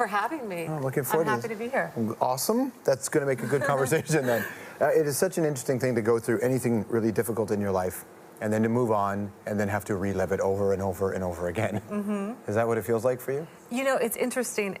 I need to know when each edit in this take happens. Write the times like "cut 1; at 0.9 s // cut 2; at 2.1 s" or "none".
cut 1; at 10.3 s